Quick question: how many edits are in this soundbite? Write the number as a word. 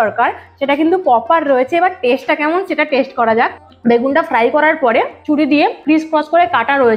two